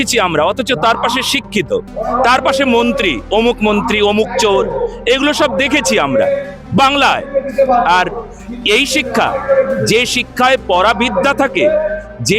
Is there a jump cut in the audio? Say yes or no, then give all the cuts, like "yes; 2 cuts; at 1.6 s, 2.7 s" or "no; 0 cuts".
no; 0 cuts